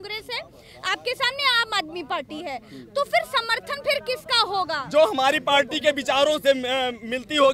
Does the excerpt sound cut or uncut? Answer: uncut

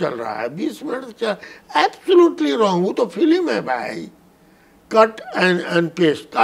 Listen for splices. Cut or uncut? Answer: uncut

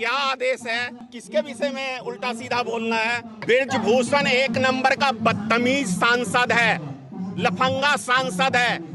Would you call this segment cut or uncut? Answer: cut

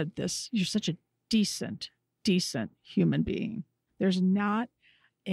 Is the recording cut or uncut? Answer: uncut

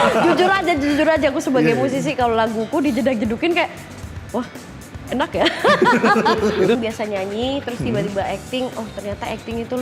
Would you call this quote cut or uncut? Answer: cut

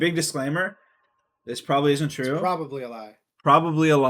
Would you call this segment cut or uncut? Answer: uncut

